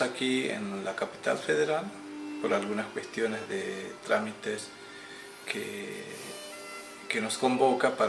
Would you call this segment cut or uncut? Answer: uncut